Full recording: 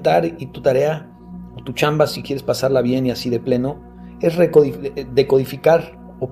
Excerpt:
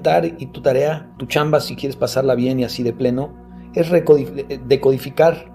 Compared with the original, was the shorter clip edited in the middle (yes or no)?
yes